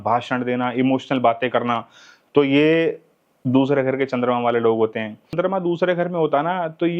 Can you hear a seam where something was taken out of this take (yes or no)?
yes